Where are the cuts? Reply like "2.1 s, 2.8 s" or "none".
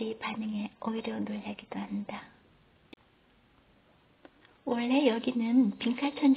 2.9 s